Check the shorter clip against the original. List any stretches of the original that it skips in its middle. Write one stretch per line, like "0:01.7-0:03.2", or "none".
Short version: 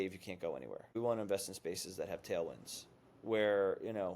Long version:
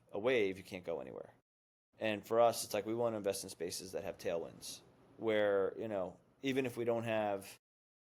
0:01.4-0:02.9